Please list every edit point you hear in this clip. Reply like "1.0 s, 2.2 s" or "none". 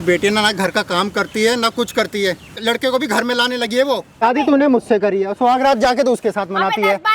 2.6 s, 4.2 s